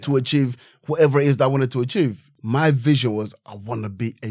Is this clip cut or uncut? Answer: cut